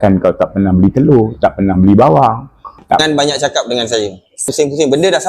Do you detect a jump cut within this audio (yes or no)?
yes